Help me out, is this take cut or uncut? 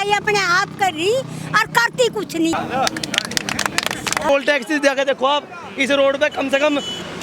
cut